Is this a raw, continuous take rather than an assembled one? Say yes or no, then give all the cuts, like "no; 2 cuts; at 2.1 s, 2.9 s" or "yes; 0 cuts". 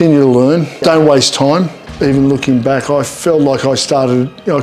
no; 2 cuts; at 0.8 s, 1.8 s